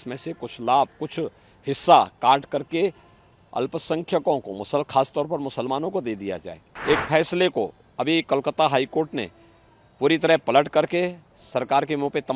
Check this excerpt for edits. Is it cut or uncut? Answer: cut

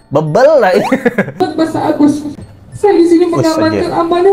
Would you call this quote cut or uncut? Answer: cut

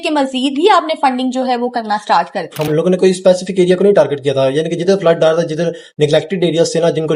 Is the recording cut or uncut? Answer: cut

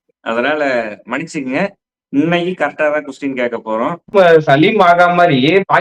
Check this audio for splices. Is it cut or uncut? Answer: cut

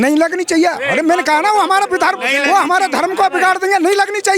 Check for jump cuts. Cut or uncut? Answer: uncut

